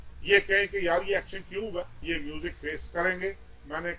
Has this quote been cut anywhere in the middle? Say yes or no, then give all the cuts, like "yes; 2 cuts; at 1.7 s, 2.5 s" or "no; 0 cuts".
yes; 1 cut; at 2.0 s